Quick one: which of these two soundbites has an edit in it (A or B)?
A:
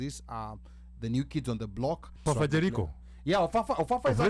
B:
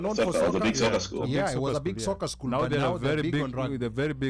A